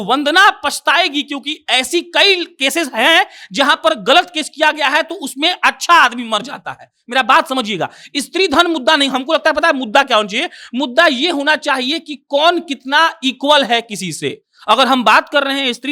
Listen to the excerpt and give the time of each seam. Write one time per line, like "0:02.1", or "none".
none